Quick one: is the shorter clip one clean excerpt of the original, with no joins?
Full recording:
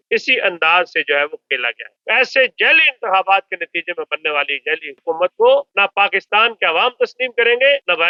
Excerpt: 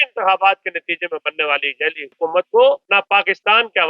yes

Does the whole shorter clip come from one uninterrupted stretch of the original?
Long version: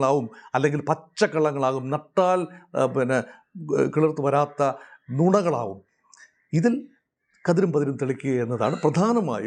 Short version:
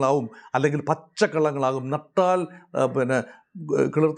yes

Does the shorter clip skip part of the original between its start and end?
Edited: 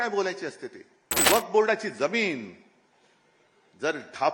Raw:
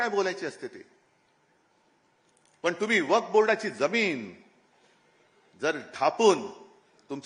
yes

